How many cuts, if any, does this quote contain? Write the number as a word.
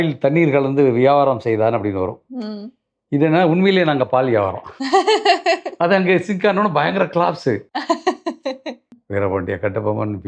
one